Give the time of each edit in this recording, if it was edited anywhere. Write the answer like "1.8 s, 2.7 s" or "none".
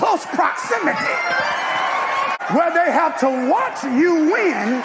2.4 s